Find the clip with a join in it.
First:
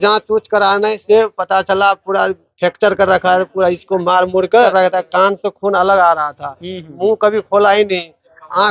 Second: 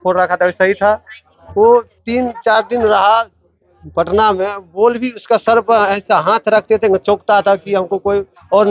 first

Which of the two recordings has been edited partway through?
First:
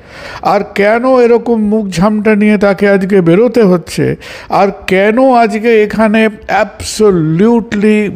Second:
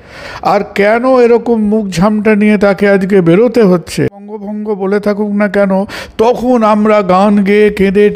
second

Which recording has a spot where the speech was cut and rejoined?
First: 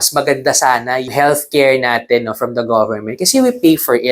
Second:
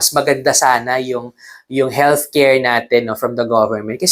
first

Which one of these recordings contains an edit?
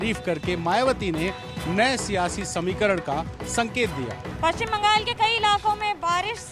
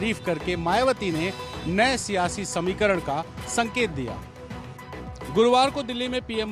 first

